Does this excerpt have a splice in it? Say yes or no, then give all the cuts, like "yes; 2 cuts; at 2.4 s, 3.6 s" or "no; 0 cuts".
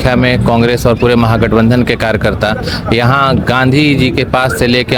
no; 0 cuts